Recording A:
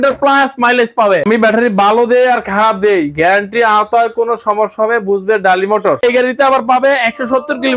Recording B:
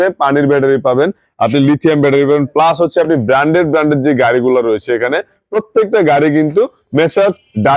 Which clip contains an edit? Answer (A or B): A